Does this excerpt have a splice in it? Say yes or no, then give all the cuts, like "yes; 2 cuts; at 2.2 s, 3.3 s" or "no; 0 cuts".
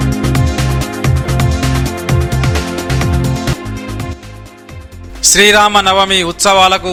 no; 0 cuts